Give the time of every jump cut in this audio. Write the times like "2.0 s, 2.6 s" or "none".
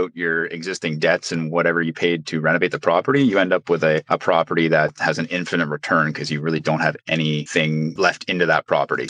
none